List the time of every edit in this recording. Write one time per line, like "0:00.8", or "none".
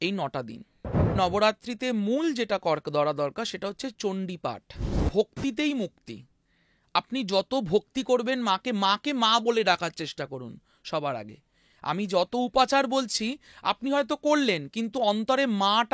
0:01.2
0:05.0

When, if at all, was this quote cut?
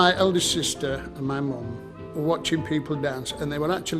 0:02.1

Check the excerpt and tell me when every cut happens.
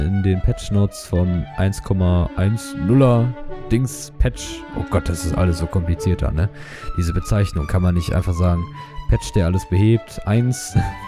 none

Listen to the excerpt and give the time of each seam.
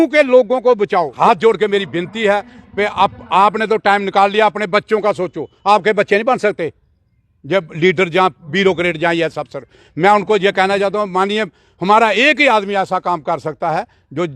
0:01.1

